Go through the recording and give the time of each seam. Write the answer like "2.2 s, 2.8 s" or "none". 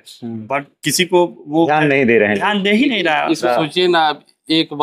3.4 s